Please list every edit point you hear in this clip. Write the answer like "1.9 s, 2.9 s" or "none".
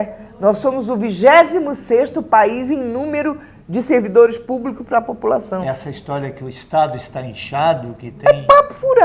none